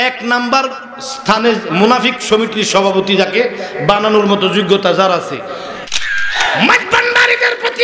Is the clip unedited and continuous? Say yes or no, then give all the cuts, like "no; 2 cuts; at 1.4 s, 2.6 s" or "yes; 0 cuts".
no; 1 cut; at 5.9 s